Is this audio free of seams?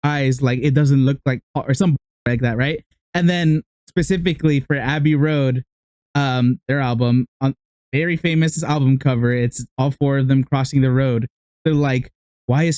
yes; 0 cuts

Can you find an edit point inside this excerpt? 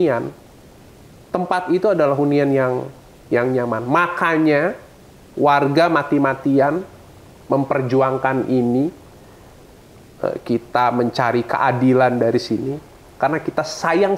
no; 0 cuts

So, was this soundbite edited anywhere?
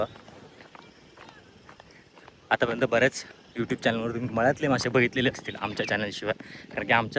no; 0 cuts

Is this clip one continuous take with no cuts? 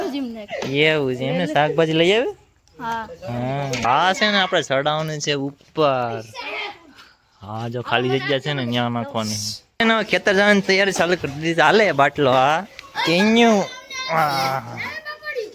no; 2 cuts; at 3.8 s, 9.8 s

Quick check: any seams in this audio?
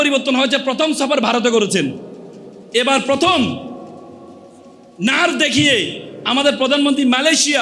no; 0 cuts

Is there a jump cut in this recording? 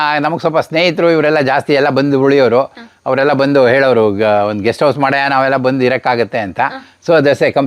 no; 0 cuts

